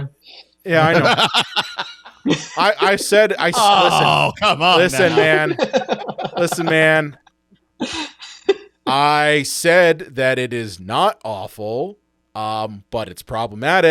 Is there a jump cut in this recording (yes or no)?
no